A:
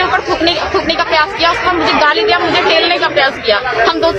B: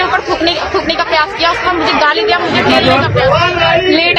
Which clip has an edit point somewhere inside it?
B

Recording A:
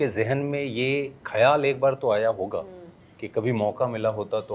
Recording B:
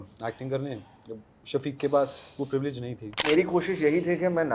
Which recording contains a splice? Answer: B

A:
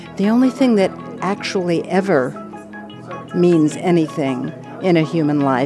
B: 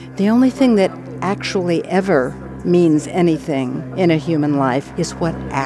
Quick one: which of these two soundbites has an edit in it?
B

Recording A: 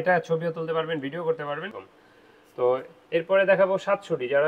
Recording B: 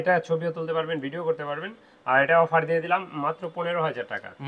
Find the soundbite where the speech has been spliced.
A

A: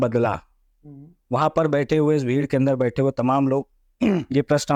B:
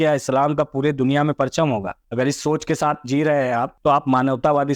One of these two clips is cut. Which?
B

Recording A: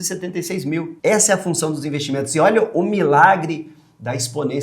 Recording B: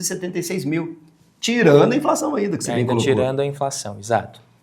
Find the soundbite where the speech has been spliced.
A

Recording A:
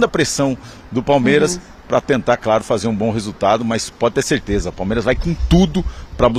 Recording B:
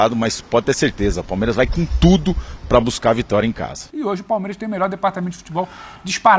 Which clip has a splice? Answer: B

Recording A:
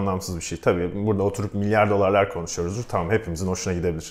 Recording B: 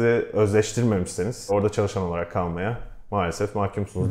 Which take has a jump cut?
B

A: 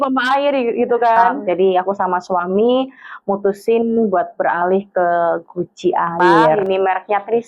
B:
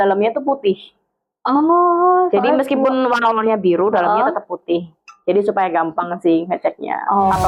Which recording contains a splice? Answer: A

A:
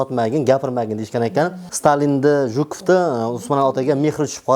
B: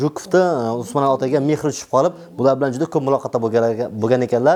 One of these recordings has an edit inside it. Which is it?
A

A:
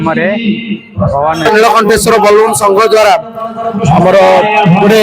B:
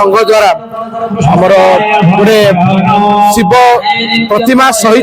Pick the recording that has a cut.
A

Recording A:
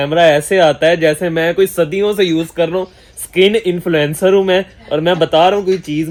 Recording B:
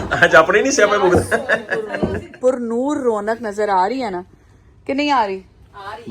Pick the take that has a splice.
B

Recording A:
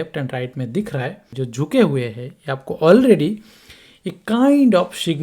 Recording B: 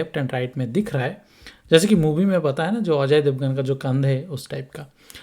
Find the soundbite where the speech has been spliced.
A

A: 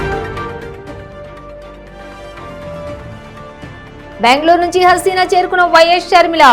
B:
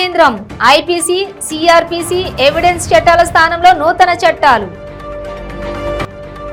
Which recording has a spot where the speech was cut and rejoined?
A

